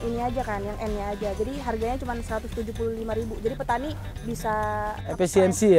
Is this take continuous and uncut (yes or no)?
yes